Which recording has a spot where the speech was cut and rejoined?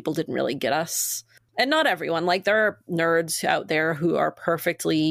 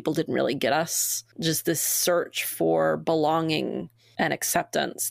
second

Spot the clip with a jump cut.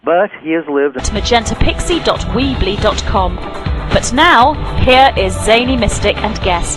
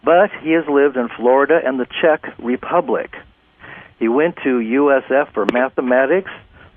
second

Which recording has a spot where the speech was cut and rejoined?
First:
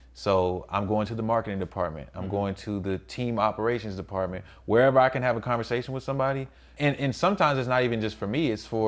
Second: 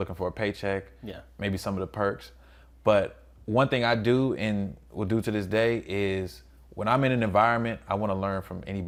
first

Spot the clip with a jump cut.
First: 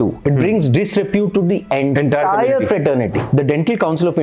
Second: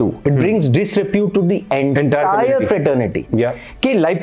first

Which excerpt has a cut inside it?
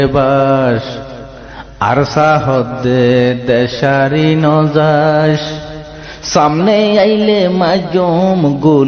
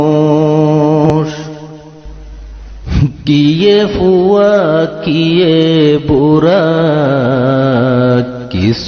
second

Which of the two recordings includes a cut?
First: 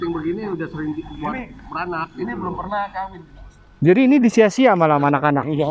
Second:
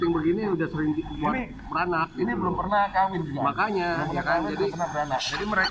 first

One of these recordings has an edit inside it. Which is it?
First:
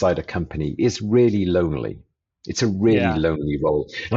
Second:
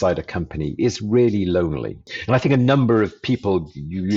second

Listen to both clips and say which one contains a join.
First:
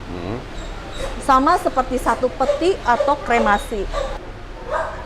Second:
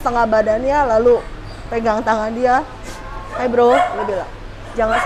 first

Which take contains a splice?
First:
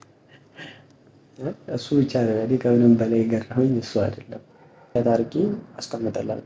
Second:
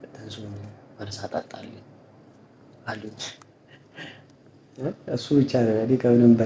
first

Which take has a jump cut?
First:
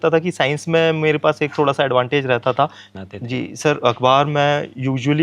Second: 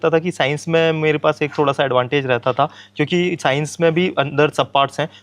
first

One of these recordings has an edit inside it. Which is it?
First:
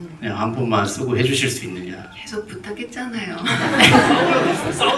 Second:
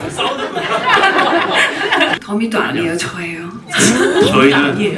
second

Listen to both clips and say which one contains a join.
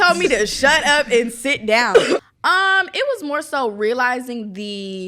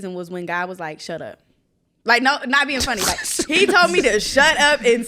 first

